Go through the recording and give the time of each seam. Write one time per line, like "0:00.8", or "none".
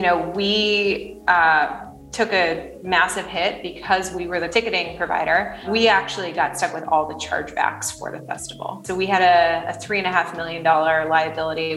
0:04.5
0:05.6
0:08.8